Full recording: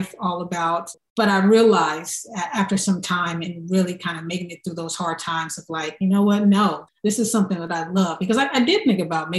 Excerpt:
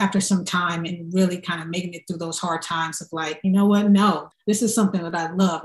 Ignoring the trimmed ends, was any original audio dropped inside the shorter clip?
no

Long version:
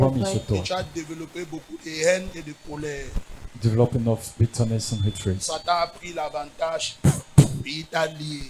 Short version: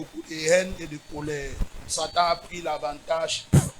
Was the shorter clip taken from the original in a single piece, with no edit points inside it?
no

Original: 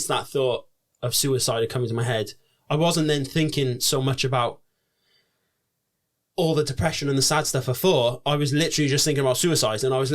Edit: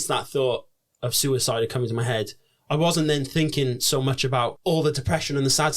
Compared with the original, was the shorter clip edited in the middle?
yes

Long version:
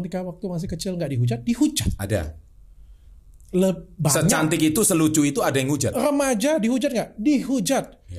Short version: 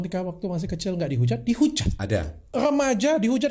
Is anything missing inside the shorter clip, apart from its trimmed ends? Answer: yes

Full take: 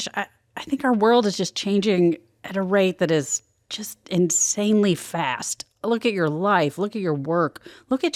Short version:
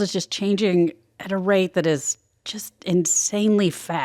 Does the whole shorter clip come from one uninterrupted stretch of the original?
yes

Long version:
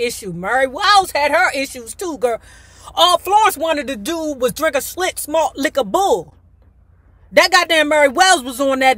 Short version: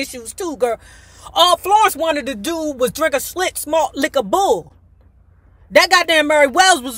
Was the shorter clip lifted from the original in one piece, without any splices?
yes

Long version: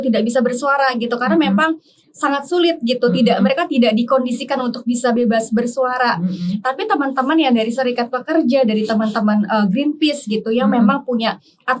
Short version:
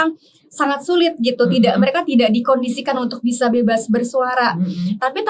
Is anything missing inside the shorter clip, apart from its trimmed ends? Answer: no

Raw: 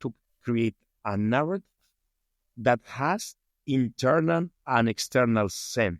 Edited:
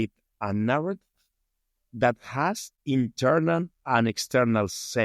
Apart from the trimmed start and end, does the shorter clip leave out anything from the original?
yes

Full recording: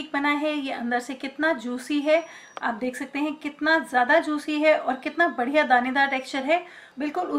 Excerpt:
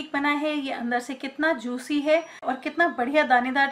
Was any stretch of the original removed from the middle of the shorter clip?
yes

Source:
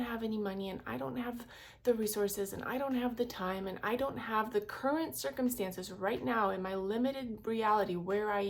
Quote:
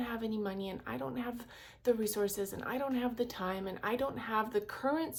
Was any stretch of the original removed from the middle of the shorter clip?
no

